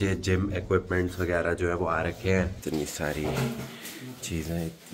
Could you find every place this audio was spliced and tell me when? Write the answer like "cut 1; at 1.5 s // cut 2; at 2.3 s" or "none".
cut 1; at 2.6 s